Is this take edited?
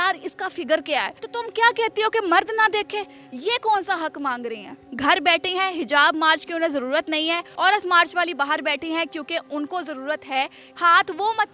yes; 4 cuts; at 1.2 s, 4.8 s, 7.5 s, 10.7 s

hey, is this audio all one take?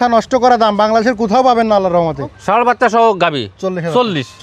no; 1 cut; at 2.4 s

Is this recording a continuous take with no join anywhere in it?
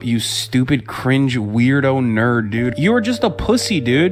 yes; 0 cuts

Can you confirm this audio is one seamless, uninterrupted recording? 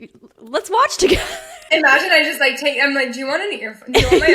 no; 1 cut; at 1.5 s

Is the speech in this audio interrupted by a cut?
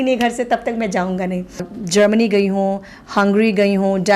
yes; 1 cut; at 1.7 s

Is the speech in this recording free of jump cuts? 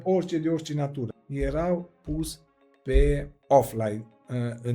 no; 2 cuts; at 1.1 s, 3.3 s

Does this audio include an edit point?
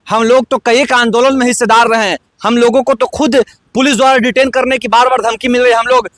no; 0 cuts

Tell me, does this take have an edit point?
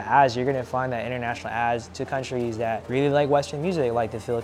yes; 1 cut; at 2.8 s

